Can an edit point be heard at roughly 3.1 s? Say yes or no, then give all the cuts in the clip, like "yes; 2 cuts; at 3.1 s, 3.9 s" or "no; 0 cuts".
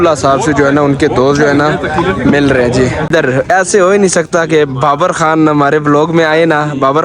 yes; 1 cut; at 3.1 s